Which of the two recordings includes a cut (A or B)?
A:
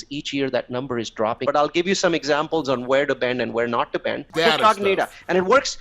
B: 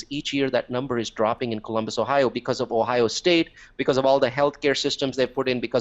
A